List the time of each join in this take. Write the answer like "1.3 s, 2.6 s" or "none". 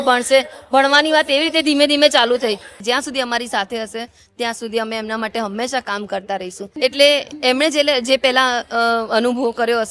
2.8 s, 6.7 s